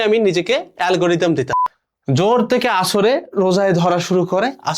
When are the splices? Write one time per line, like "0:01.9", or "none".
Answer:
0:01.6